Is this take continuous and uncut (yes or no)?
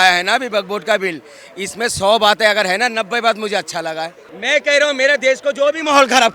no